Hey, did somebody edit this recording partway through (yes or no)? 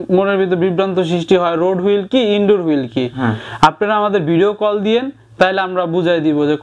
no